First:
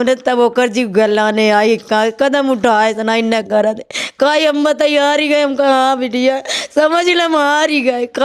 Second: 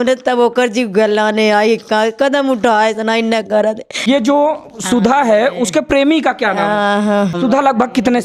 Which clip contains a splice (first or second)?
second